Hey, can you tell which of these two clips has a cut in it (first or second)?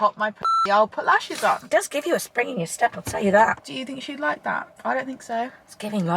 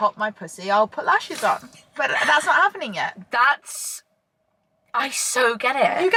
first